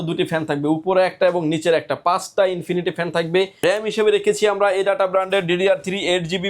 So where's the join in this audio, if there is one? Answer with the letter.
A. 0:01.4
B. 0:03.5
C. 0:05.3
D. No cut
B